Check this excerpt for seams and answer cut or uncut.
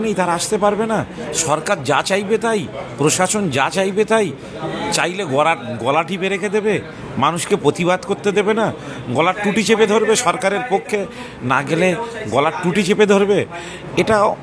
uncut